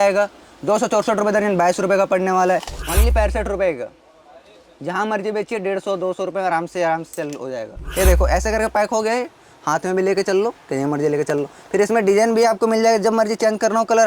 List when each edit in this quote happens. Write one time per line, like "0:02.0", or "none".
0:02.7
0:07.8

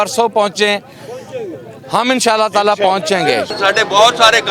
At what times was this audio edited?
0:03.5

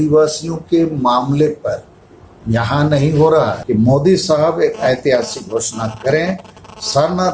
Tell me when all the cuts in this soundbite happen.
0:03.6

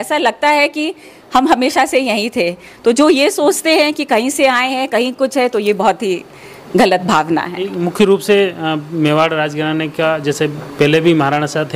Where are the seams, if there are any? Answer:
none

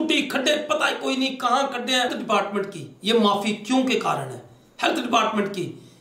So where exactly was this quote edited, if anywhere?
0:02.2

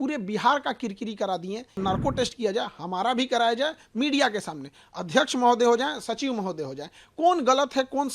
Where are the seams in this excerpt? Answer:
0:01.8

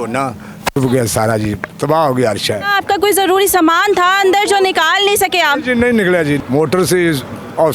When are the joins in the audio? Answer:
0:02.7
0:06.4

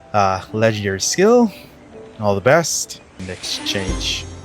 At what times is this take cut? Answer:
0:03.3

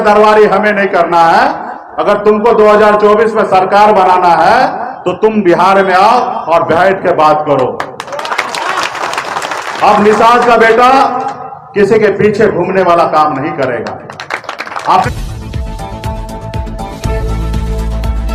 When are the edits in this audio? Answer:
none

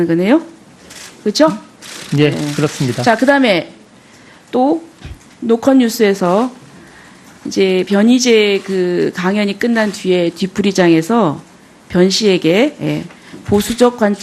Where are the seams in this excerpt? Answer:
0:10.9

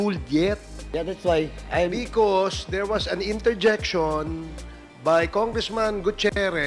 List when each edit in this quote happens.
none

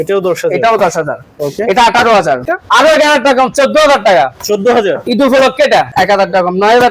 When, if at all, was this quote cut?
0:02.5
0:05.9

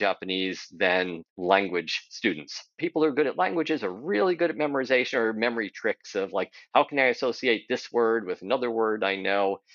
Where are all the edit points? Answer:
0:01.2
0:02.8

